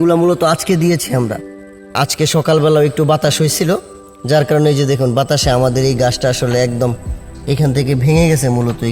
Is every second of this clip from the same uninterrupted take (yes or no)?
no